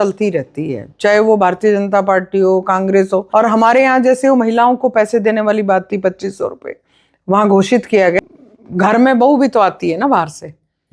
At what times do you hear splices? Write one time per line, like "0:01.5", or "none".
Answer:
0:03.3
0:08.2

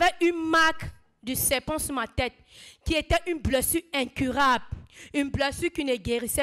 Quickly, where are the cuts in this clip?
none

